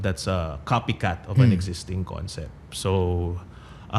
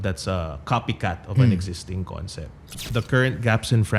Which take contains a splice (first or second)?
second